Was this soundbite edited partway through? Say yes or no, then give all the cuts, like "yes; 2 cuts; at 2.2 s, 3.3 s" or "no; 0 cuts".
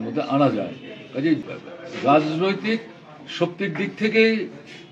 yes; 1 cut; at 1.4 s